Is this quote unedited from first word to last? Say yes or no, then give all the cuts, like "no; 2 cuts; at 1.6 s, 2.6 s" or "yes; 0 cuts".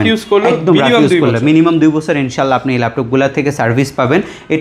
yes; 0 cuts